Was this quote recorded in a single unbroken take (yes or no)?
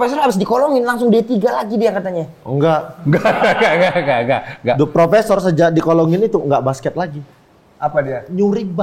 yes